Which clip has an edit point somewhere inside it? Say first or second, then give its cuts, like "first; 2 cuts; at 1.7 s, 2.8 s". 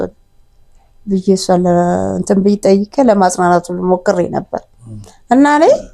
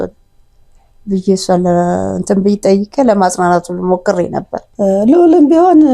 second; 1 cut; at 4.6 s